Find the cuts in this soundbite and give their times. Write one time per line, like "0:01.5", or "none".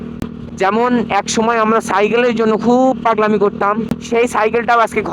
0:03.9